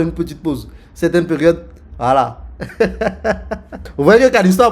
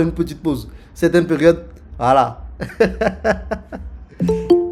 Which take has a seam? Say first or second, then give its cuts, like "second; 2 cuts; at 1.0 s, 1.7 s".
first; 1 cut; at 3.8 s